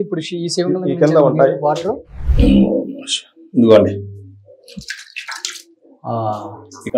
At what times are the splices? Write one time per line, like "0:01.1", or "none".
none